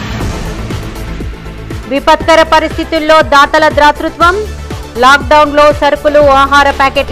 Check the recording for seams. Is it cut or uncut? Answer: uncut